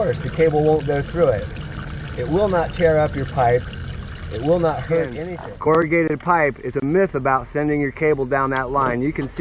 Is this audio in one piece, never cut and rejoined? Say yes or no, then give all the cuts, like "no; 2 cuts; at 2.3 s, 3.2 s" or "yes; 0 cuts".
no; 1 cut; at 5.7 s